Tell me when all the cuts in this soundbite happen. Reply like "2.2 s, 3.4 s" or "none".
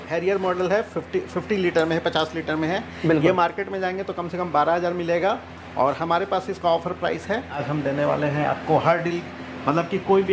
7.6 s